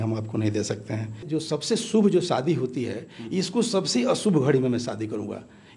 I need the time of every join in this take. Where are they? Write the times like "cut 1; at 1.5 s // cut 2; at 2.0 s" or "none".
cut 1; at 1.2 s